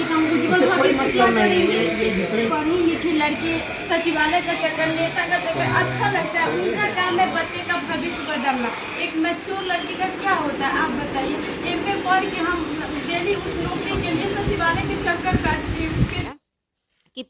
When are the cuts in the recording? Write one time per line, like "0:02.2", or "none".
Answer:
0:02.4
0:16.2